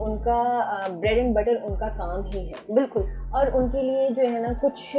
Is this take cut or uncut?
uncut